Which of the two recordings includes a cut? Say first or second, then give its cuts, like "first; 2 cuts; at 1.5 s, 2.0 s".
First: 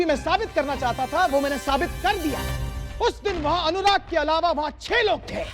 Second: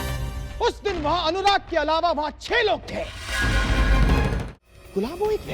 second; 1 cut; at 4.5 s